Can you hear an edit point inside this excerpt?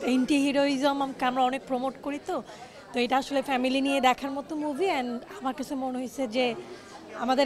no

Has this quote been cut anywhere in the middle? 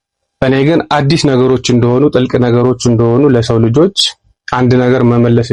no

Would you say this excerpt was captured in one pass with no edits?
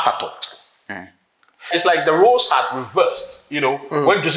no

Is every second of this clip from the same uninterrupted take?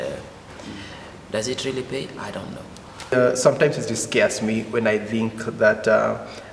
no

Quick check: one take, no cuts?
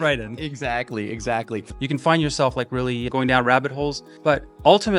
no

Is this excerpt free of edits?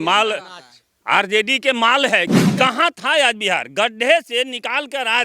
no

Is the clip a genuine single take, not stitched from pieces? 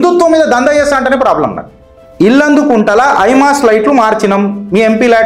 no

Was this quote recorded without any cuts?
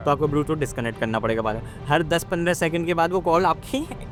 yes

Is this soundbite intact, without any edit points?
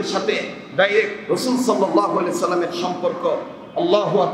yes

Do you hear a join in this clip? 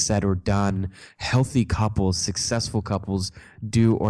no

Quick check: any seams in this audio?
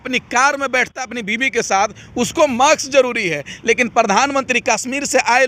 no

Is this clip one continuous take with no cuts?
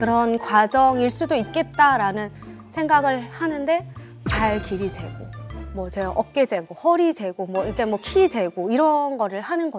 yes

